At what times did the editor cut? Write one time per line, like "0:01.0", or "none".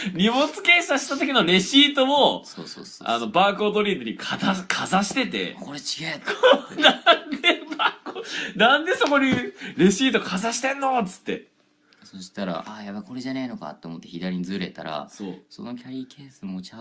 0:05.0